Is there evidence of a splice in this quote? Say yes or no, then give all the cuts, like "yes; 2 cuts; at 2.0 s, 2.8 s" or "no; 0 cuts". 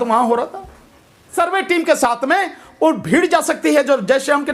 yes; 1 cut; at 1.3 s